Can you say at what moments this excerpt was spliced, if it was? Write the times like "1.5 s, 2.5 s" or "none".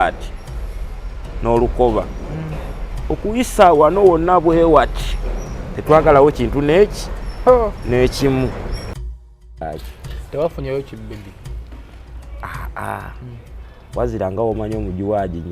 9.4 s